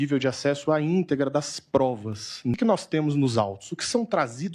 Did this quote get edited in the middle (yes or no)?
yes